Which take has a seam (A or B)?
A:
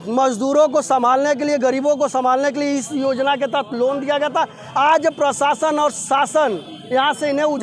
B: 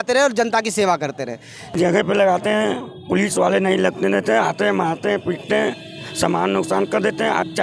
B